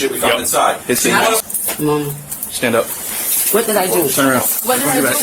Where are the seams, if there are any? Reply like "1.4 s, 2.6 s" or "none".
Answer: 1.4 s